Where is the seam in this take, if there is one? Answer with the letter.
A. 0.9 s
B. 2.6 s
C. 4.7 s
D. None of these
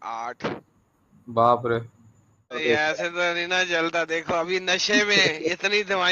B